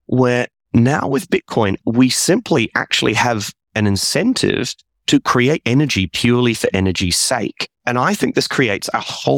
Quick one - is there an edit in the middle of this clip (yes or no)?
yes